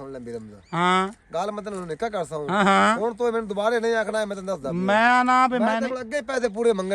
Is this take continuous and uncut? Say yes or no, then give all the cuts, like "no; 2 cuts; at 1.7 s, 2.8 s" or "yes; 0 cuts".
yes; 0 cuts